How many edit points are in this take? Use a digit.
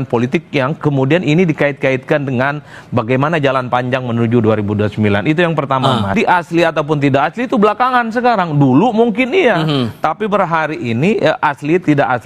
1